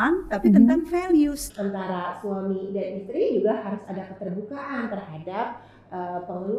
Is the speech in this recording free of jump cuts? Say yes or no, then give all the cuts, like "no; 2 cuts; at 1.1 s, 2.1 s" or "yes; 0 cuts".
no; 1 cut; at 1.4 s